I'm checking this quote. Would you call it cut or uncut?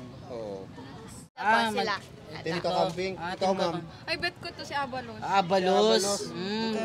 cut